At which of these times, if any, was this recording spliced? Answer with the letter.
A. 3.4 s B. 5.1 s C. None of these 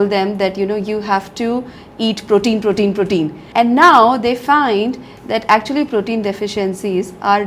A